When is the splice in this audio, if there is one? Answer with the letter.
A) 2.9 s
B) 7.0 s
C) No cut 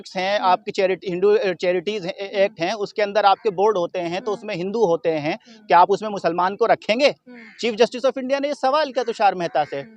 C